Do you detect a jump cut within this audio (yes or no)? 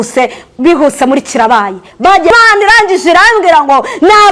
yes